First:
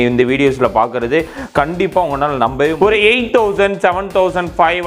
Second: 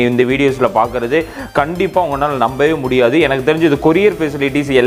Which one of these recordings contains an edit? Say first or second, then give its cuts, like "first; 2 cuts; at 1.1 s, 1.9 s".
first; 1 cut; at 2.7 s